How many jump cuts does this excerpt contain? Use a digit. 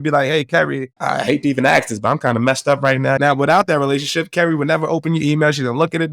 2